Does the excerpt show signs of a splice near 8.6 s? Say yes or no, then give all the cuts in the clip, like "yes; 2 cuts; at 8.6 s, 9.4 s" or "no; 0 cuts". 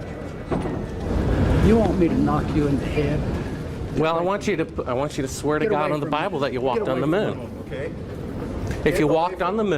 no; 1 cut; at 1.0 s